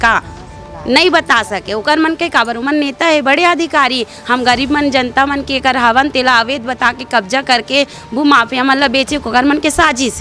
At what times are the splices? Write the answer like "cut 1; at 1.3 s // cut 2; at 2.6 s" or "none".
none